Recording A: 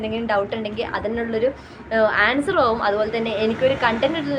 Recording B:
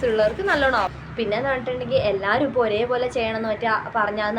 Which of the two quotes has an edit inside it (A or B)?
B